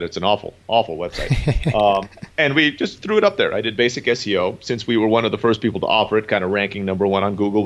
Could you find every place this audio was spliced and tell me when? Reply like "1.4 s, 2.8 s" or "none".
2.2 s